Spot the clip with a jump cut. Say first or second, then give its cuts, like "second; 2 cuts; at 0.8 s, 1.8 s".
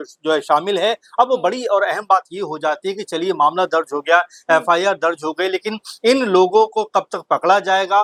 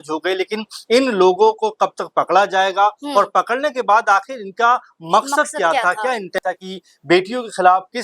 second; 1 cut; at 6.4 s